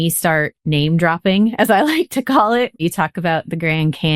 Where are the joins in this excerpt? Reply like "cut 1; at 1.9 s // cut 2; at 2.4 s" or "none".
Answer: cut 1; at 2.8 s